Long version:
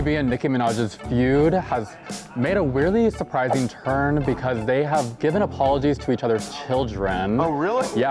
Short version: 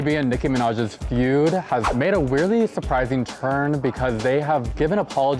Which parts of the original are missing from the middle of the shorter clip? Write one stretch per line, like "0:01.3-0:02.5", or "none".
0:01.9-0:02.3